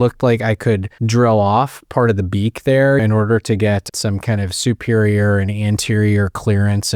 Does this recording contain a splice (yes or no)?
yes